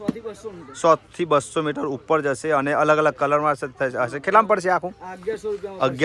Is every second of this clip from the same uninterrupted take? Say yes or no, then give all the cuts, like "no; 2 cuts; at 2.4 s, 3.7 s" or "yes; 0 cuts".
yes; 0 cuts